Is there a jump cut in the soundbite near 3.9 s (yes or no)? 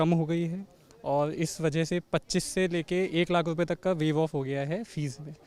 no